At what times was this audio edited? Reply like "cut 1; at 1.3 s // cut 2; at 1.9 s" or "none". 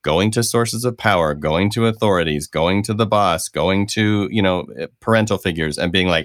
none